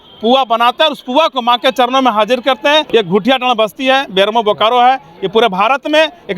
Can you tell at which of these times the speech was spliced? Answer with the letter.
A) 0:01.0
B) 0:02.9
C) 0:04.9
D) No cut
B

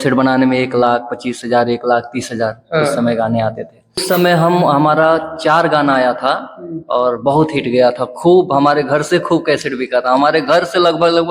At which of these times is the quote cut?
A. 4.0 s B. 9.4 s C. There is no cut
A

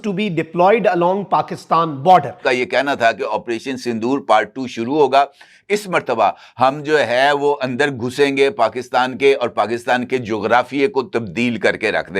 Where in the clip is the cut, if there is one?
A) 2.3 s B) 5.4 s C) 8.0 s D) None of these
A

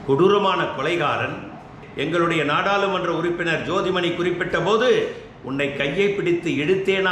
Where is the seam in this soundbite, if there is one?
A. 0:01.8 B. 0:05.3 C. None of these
A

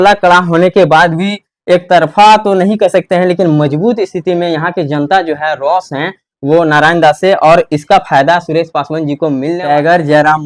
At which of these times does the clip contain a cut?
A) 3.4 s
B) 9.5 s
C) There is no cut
B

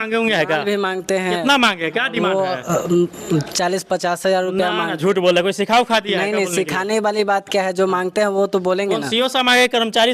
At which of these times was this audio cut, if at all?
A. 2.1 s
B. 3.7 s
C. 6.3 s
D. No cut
D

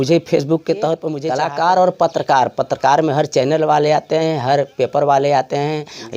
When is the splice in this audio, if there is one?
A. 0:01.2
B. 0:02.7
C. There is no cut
A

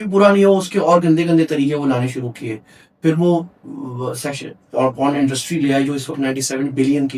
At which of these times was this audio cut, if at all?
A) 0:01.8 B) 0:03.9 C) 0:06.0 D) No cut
D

